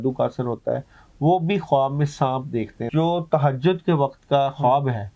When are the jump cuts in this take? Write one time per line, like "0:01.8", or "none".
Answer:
0:02.8